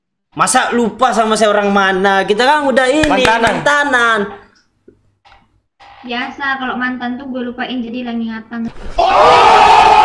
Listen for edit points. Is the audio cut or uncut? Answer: uncut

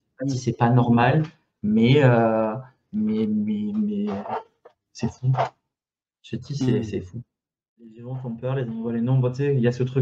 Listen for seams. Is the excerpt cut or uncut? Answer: cut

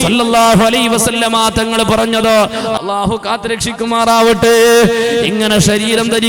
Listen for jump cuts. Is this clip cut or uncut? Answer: cut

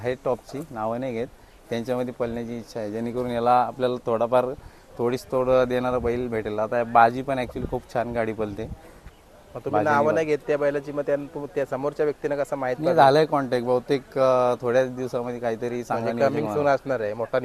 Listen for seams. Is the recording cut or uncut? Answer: uncut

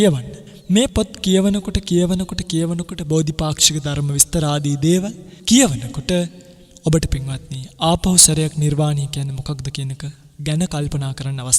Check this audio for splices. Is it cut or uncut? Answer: uncut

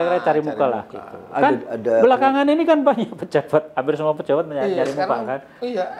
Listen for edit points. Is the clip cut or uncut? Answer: uncut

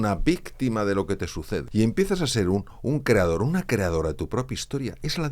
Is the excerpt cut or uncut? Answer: cut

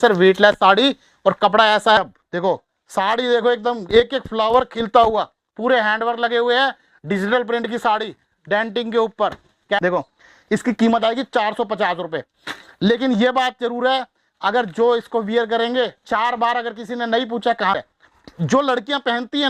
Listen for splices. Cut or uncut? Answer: cut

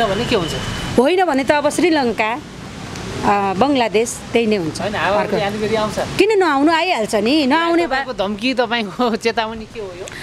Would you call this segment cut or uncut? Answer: uncut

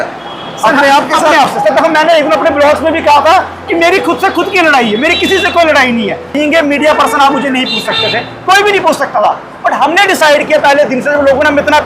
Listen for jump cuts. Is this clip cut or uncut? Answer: cut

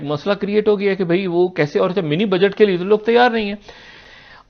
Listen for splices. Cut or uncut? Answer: uncut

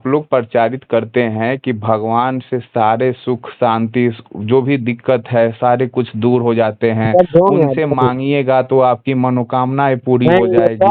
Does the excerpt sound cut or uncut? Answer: uncut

